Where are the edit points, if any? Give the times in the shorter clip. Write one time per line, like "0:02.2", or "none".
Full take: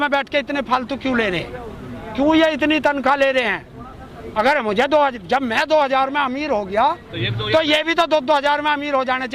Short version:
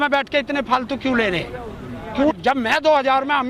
0:02.3

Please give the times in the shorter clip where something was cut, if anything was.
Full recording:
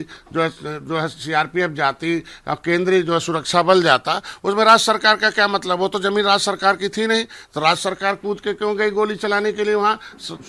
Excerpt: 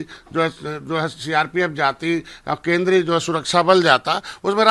none

